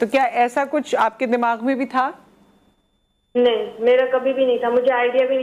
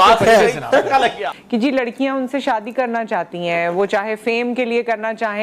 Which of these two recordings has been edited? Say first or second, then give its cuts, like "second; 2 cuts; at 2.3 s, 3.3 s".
second; 1 cut; at 1.3 s